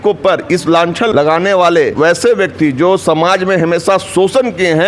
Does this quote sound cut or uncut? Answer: cut